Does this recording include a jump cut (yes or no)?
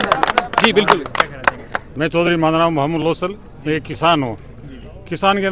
no